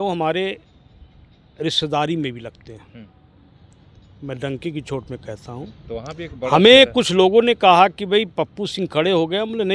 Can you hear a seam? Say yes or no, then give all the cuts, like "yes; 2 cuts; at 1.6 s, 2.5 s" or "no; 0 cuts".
no; 0 cuts